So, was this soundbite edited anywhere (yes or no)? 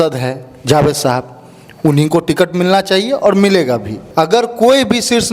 yes